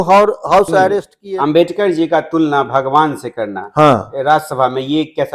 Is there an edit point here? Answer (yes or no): yes